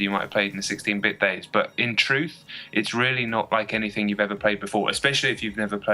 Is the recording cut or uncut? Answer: cut